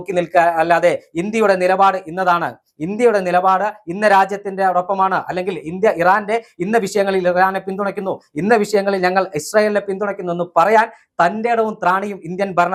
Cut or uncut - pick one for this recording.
uncut